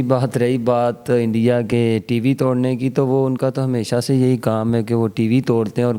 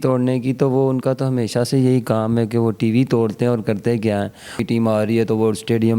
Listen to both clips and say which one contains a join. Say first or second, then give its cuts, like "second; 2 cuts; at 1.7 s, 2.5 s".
second; 1 cut; at 4.6 s